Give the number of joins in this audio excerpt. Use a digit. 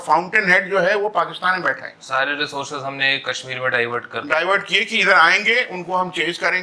0